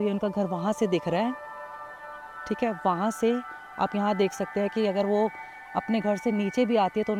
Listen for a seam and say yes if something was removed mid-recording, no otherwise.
no